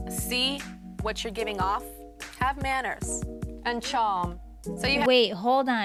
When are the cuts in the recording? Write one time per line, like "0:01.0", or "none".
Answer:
none